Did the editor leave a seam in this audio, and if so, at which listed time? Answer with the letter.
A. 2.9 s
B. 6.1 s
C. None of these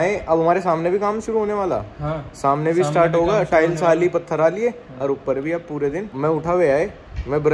B